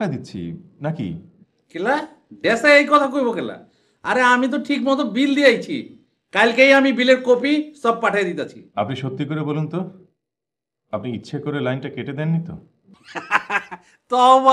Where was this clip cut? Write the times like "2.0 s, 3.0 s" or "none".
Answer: 8.6 s